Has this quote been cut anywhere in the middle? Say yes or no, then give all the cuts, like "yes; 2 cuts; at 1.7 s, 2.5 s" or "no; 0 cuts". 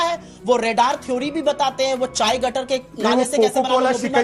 no; 0 cuts